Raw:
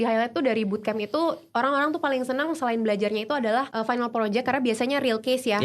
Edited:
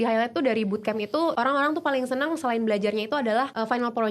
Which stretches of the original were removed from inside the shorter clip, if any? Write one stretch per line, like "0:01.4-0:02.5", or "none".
0:01.3-0:01.5

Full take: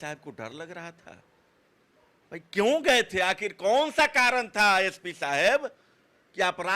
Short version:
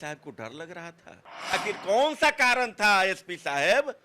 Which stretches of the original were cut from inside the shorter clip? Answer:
0:01.6-0:03.3

